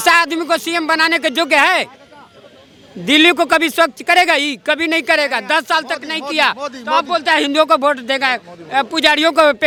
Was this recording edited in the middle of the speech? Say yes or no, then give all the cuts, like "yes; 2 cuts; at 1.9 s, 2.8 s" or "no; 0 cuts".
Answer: no; 0 cuts